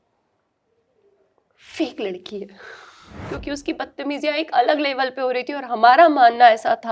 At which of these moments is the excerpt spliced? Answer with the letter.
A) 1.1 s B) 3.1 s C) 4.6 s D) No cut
B